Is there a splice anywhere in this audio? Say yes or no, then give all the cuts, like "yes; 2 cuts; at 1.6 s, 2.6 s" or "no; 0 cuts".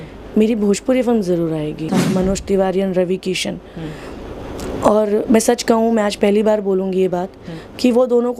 yes; 1 cut; at 1.9 s